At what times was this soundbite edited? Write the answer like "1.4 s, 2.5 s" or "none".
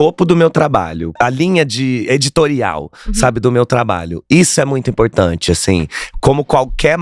1.2 s